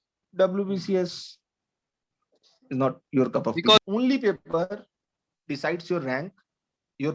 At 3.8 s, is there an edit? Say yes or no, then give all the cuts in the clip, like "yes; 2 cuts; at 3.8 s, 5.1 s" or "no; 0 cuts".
yes; 1 cut; at 3.8 s